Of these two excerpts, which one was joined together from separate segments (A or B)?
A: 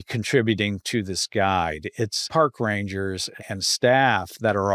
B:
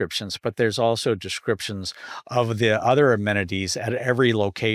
A